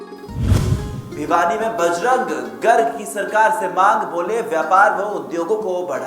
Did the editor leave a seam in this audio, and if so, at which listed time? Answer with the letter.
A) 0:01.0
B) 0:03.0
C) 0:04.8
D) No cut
A